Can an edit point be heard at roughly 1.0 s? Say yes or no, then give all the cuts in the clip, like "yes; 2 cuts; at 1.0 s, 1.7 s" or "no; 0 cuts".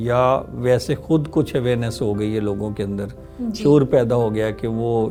no; 0 cuts